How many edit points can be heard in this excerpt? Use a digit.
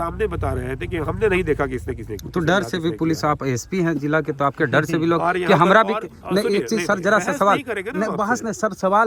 0